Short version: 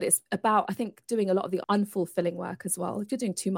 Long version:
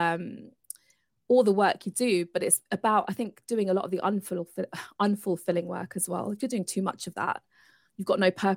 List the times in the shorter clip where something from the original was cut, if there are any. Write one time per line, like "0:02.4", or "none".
0:01.6